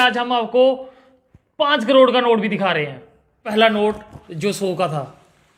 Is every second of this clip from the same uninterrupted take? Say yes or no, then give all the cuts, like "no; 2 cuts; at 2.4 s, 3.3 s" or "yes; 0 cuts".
no; 1 cut; at 3.5 s